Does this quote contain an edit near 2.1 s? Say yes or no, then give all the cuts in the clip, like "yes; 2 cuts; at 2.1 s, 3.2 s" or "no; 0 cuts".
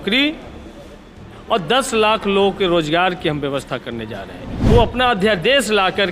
no; 1 cut; at 4.5 s